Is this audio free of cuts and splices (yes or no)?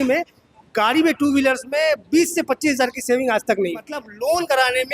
no